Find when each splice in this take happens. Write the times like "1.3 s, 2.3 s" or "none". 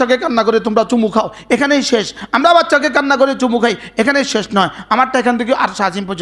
none